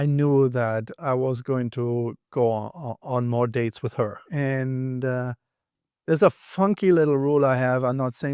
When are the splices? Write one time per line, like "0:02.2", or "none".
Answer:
0:04.2